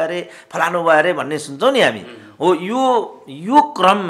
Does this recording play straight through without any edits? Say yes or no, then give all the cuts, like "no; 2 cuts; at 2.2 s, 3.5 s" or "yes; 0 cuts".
yes; 0 cuts